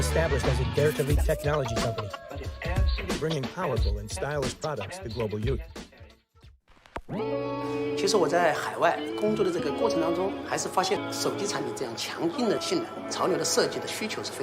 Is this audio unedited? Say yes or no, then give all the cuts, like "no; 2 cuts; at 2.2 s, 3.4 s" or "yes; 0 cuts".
no; 1 cut; at 11.0 s